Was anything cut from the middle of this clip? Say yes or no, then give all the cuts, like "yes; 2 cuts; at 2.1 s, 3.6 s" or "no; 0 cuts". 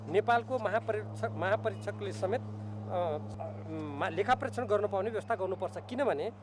yes; 1 cut; at 3.3 s